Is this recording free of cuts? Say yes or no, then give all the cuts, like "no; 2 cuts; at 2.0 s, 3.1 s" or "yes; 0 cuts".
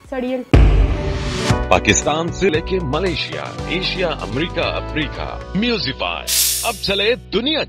yes; 0 cuts